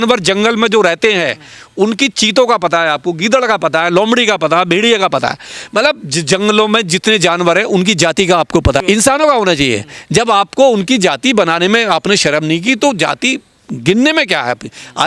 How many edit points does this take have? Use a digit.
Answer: 0